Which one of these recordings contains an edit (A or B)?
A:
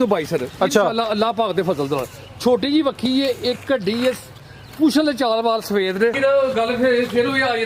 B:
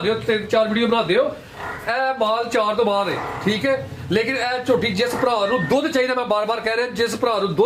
A